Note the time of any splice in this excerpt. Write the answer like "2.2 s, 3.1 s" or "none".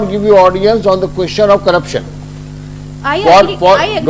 none